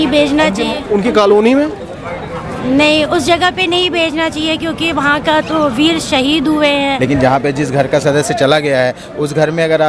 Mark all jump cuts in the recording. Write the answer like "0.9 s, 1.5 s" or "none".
7.0 s